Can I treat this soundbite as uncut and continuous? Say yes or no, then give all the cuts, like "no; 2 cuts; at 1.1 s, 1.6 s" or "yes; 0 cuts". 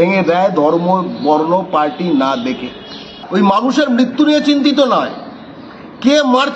no; 1 cut; at 3.2 s